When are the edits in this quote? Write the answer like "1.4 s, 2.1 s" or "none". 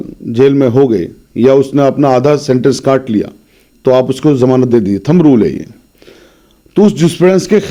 none